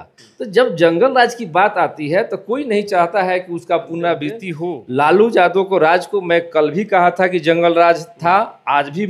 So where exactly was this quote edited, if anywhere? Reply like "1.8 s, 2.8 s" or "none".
4.4 s